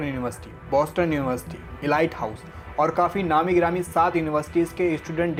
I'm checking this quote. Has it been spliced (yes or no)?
no